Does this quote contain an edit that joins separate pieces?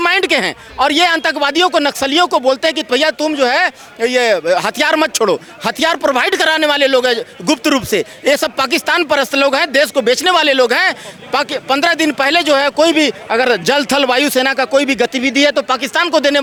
no; 0 cuts

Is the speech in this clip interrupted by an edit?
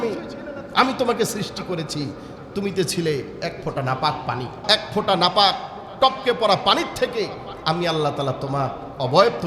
yes; 1 cut; at 4.5 s

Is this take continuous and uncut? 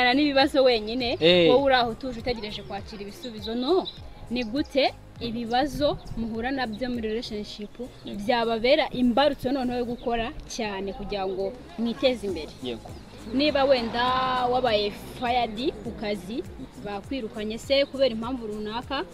no; 1 cut; at 3.9 s

